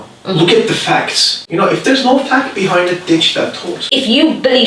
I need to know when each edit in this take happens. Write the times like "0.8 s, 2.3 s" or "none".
1.4 s, 3.9 s